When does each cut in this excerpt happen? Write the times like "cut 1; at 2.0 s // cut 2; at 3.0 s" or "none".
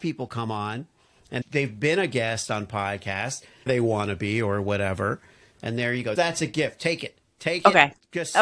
cut 1; at 3.7 s // cut 2; at 6.1 s